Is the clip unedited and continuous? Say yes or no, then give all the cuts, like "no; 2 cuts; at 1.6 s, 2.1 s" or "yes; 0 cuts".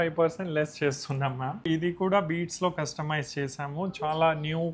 no; 1 cut; at 1.7 s